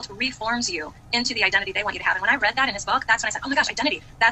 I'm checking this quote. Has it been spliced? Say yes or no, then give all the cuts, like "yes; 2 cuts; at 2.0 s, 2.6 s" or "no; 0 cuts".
no; 0 cuts